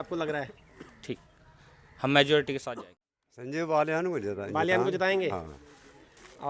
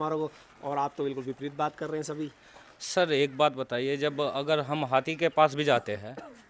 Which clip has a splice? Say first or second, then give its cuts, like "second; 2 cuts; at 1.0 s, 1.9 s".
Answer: first; 1 cut; at 2.7 s